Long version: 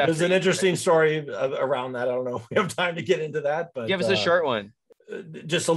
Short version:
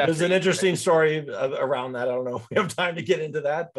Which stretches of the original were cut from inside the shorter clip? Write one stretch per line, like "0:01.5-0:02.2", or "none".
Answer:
none